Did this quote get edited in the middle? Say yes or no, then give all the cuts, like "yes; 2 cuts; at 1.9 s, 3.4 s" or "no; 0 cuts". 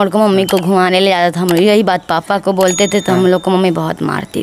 no; 0 cuts